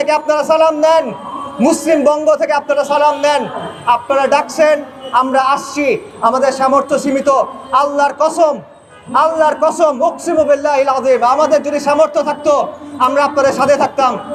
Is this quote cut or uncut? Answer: uncut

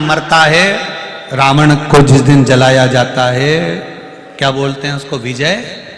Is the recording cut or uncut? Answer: uncut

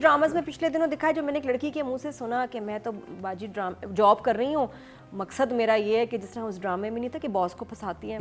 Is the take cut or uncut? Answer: uncut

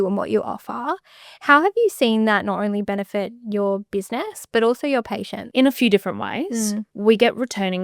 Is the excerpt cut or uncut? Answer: cut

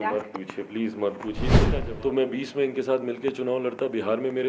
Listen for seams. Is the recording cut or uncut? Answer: cut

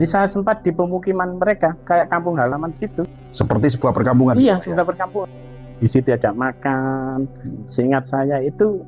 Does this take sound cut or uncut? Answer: cut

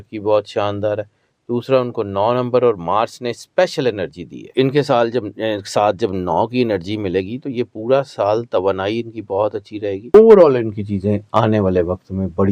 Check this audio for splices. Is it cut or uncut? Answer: cut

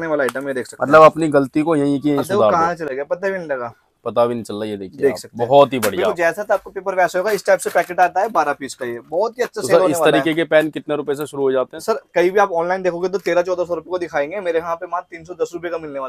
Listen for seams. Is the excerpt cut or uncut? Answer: uncut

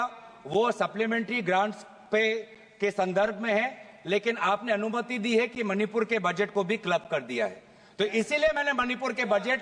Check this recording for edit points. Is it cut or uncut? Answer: uncut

